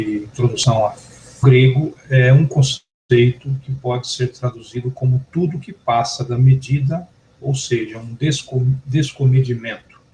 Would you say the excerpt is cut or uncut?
uncut